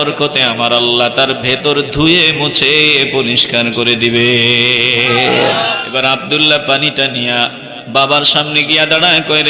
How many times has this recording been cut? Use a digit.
1